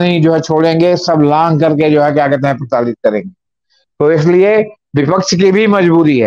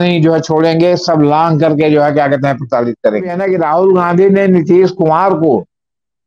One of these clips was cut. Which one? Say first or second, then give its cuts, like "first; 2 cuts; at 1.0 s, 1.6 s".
second; 1 cut; at 3.4 s